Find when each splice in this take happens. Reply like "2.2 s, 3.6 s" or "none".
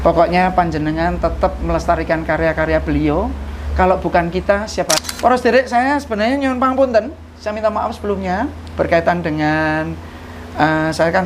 5.0 s